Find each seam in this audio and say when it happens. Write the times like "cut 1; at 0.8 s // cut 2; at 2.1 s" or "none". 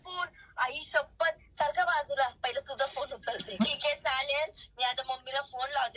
cut 1; at 3.6 s